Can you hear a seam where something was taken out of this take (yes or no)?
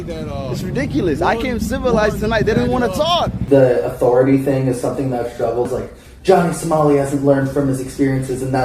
yes